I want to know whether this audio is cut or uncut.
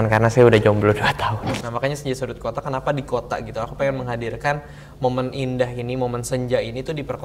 cut